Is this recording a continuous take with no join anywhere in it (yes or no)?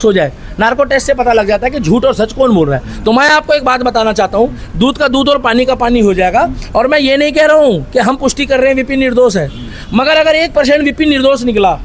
yes